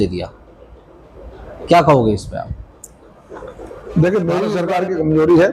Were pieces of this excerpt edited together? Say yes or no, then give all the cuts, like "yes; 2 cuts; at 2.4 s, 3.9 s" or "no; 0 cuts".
yes; 1 cut; at 4.6 s